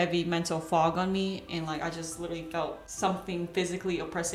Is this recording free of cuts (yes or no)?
yes